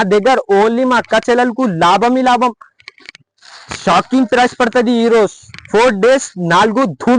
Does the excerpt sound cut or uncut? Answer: uncut